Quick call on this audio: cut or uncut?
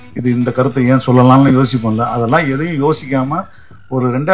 uncut